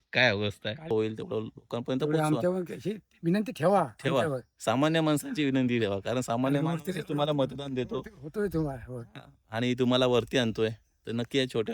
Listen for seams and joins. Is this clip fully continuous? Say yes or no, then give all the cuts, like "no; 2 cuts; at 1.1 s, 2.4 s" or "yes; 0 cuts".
no; 1 cut; at 0.9 s